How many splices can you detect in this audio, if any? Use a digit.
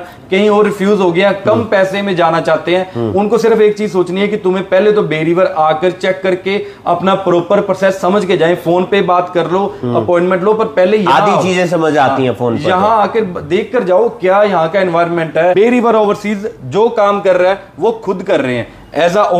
1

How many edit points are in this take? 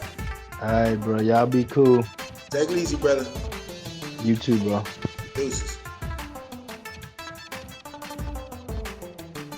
1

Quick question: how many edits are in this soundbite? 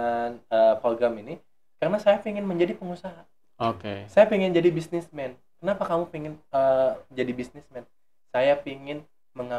0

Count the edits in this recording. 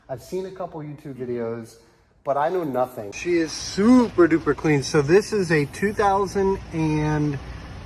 1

